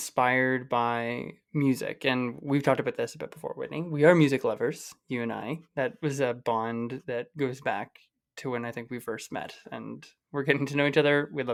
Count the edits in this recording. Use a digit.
0